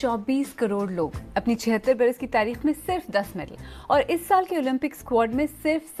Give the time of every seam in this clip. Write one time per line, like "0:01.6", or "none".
none